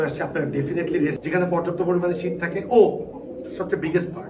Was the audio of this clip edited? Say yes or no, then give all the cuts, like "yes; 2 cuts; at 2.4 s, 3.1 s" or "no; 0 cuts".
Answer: yes; 1 cut; at 1.2 s